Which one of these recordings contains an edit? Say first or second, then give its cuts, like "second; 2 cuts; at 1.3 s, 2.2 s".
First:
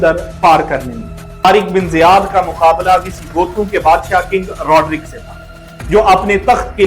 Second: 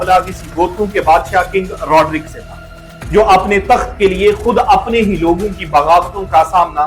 first; 1 cut; at 1.4 s